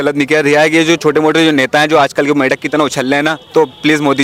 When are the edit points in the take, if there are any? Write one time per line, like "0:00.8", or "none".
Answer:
none